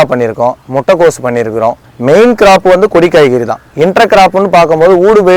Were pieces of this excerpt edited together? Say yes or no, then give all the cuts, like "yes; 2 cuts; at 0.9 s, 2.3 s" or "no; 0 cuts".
yes; 1 cut; at 1.9 s